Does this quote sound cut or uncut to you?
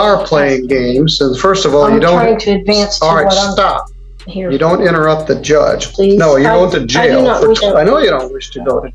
cut